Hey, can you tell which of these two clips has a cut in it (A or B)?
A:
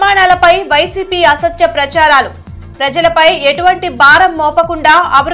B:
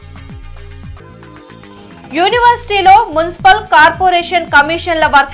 B